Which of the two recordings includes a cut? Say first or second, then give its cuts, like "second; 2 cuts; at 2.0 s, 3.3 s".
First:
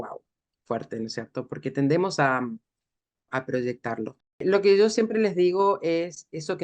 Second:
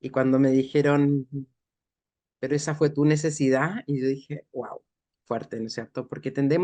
first; 2 cuts; at 3.3 s, 4.4 s